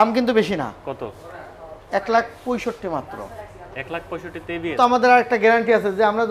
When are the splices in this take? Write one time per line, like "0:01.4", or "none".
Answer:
0:04.8